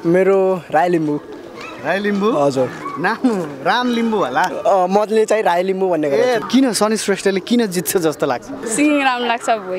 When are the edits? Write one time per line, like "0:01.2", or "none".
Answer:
0:06.4
0:08.6